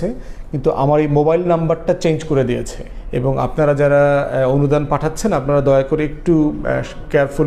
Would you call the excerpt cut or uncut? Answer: uncut